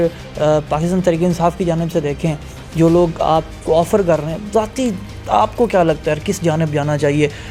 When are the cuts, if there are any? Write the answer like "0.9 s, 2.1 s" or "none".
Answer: none